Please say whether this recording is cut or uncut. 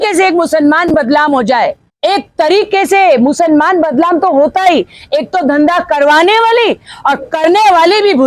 uncut